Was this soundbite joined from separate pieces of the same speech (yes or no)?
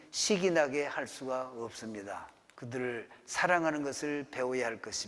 yes